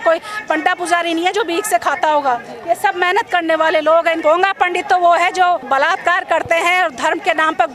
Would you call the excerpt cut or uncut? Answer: cut